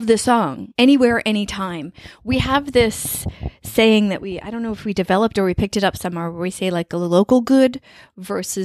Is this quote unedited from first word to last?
yes; 0 cuts

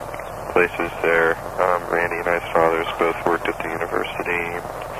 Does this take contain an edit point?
no; 0 cuts

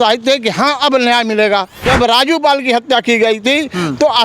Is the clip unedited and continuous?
no; 1 cut; at 1.9 s

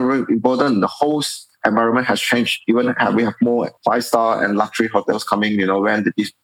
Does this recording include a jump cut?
yes; 1 cut; at 3.7 s

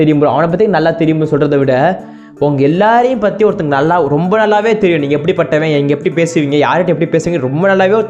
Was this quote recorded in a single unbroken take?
yes; 0 cuts

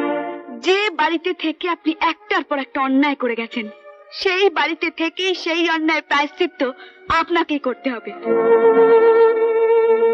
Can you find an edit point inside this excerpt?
no; 0 cuts

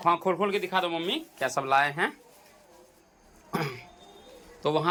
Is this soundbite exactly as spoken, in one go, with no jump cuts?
yes; 0 cuts

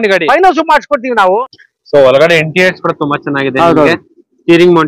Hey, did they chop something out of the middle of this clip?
yes; 1 cut; at 1.4 s

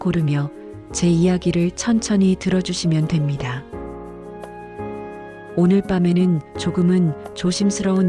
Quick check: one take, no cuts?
yes; 0 cuts

